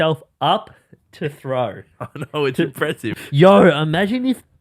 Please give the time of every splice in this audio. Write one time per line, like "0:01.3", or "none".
0:03.1